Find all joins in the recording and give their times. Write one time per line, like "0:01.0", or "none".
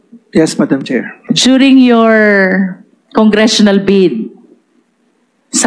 0:01.1